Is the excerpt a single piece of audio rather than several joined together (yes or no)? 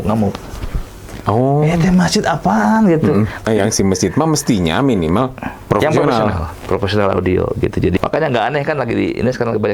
no